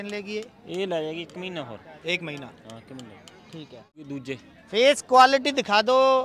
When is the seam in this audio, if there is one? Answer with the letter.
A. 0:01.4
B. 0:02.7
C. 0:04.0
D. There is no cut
C